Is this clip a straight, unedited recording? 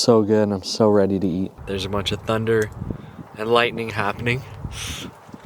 no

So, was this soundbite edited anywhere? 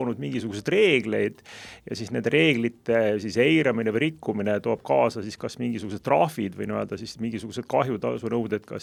no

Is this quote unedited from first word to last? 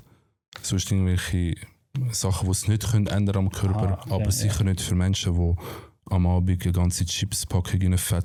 yes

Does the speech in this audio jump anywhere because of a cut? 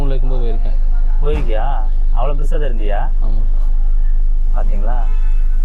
no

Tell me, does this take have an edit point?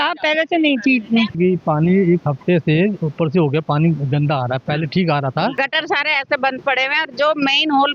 yes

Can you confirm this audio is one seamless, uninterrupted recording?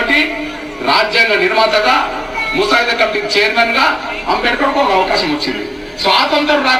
yes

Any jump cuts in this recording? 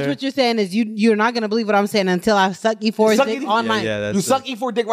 no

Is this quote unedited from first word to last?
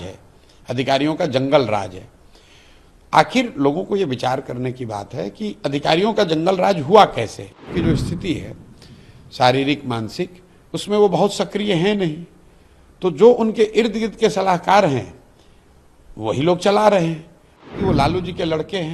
no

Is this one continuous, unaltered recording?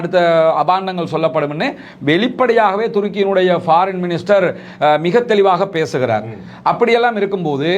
yes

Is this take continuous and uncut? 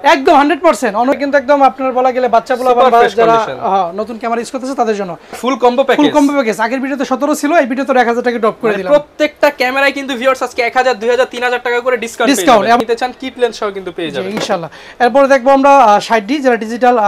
no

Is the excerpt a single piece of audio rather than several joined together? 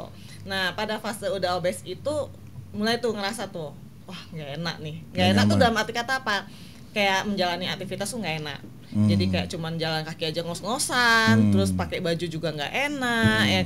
yes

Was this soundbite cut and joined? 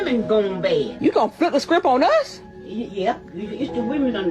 yes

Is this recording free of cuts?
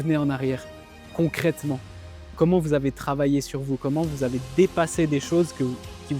yes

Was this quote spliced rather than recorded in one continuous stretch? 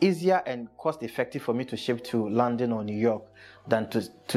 no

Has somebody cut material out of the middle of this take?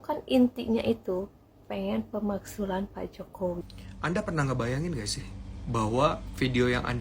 yes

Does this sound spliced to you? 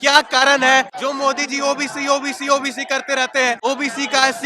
yes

